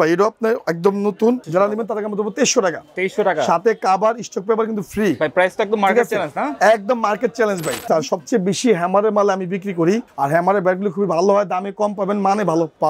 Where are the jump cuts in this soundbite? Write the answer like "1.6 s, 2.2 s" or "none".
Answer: 1.4 s, 7.9 s, 10.1 s